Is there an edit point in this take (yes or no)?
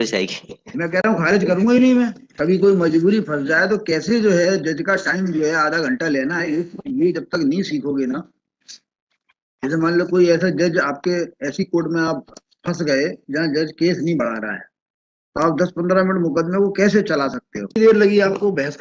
yes